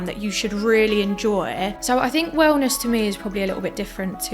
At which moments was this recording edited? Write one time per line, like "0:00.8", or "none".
0:01.8

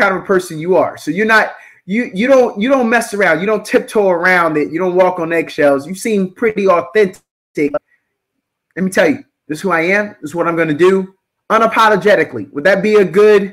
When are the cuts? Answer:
none

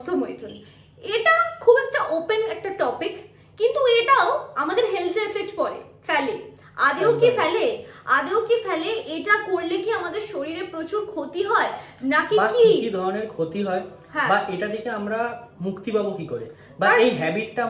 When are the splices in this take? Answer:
none

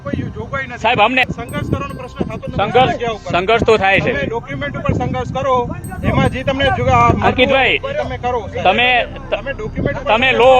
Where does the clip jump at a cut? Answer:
0:01.2

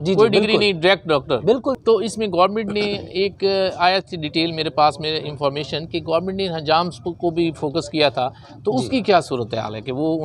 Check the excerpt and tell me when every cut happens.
0:01.7

